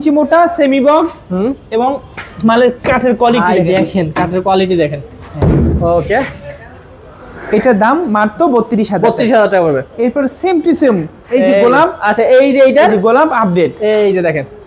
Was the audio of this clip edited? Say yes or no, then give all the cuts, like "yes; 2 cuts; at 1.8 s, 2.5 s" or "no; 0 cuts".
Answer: no; 0 cuts